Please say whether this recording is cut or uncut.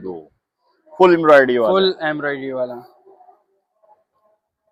uncut